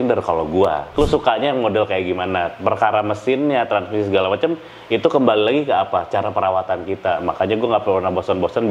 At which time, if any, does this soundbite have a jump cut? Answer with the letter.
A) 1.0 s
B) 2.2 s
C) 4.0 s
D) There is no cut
A